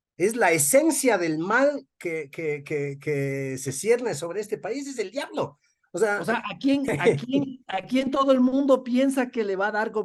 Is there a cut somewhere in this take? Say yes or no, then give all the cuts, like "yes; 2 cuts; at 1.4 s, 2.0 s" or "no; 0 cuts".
no; 0 cuts